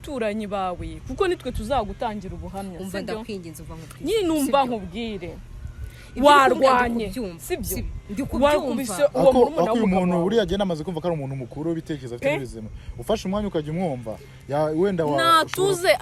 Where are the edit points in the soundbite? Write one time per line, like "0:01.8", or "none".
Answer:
none